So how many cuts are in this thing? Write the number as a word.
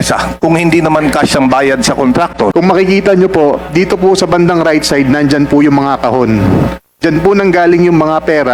one